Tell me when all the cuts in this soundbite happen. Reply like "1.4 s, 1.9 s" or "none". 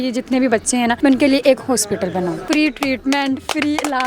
0.9 s, 2.4 s